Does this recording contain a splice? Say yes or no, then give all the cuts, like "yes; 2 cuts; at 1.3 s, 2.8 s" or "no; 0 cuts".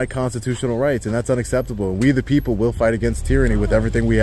no; 0 cuts